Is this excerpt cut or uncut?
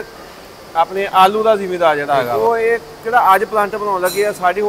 cut